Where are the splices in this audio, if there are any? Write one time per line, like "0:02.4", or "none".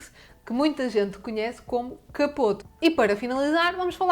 0:02.7